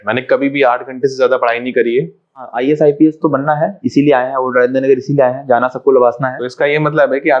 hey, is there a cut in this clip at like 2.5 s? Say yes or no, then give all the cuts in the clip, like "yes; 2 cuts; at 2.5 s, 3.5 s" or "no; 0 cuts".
yes; 2 cuts; at 2.5 s, 6.4 s